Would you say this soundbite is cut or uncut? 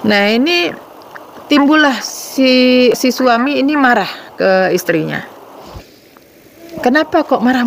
cut